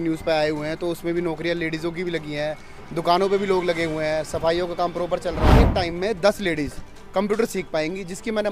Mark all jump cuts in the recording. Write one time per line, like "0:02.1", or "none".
0:05.7